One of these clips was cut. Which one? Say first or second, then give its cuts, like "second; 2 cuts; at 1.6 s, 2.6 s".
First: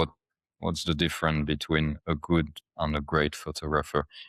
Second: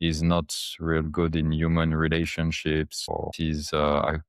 second; 1 cut; at 3.2 s